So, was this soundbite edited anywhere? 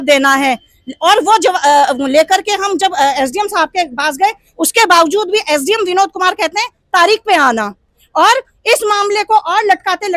no; 0 cuts

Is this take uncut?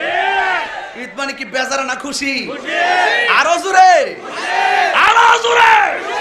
yes; 0 cuts

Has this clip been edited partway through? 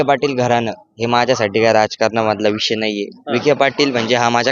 no; 0 cuts

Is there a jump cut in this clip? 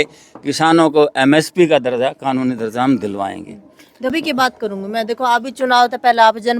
yes; 1 cut; at 4.1 s

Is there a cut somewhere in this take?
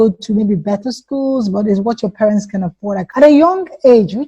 yes; 1 cut; at 3.0 s

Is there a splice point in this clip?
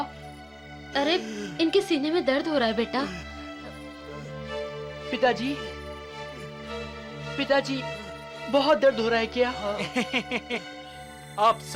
no; 0 cuts

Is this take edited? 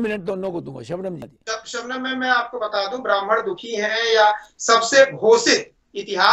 yes; 1 cut; at 1.3 s

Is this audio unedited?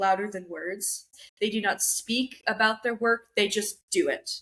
no; 1 cut; at 1.1 s

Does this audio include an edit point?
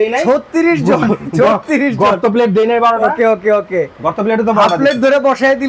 no; 0 cuts

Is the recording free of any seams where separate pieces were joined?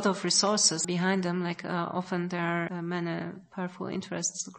no; 2 cuts; at 0.8 s, 2.7 s

